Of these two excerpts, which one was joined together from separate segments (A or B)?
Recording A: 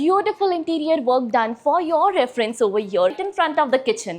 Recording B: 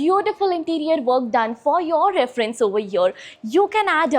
A